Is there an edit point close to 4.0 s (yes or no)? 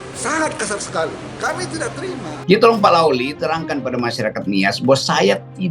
no